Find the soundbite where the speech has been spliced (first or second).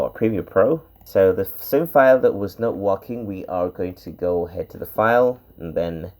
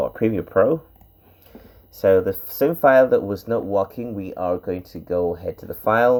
first